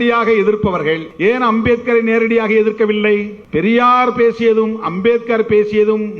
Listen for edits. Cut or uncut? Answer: cut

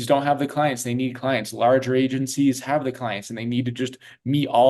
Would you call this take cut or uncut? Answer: uncut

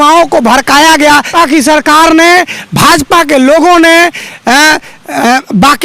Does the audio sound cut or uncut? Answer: cut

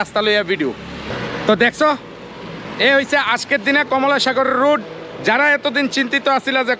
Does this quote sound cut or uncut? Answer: cut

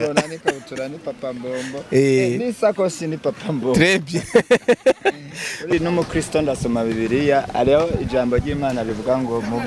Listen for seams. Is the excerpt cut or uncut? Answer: cut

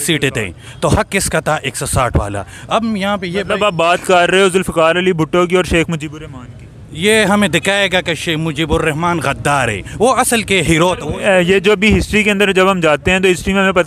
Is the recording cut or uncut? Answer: cut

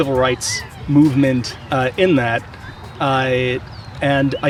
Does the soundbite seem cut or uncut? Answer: uncut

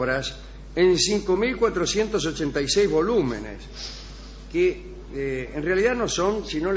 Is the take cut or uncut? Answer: cut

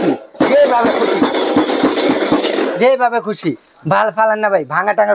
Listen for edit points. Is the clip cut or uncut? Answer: uncut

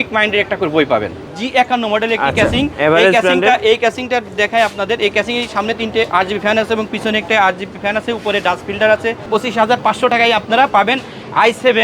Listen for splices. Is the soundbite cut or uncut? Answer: cut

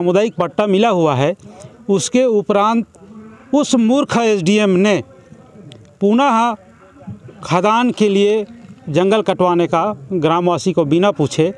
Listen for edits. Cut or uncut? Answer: uncut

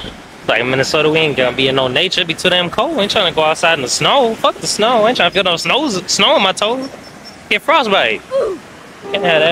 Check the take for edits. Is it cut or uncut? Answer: uncut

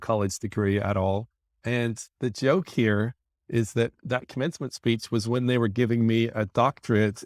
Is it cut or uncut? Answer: cut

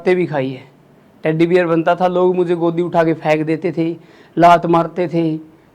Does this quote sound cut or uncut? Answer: uncut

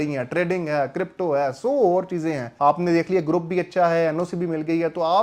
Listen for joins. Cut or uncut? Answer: cut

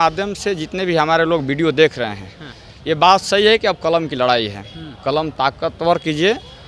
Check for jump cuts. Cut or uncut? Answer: uncut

